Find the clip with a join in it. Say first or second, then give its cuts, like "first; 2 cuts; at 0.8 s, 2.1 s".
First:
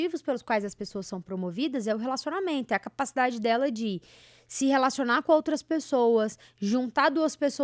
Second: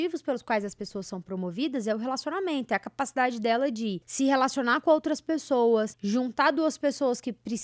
second; 2 cuts; at 4.0 s, 6.0 s